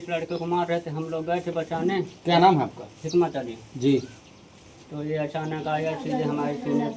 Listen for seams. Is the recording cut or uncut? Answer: uncut